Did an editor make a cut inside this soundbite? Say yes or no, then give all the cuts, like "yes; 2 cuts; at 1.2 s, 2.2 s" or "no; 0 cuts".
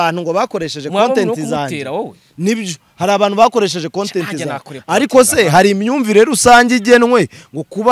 no; 0 cuts